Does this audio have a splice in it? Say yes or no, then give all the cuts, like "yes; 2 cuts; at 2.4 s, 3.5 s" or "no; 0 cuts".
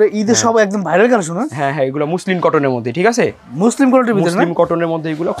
no; 0 cuts